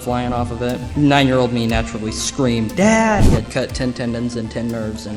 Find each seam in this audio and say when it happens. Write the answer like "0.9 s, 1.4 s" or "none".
3.3 s